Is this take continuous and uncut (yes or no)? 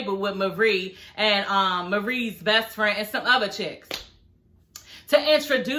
yes